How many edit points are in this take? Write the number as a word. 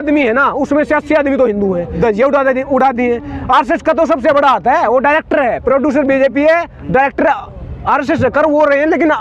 one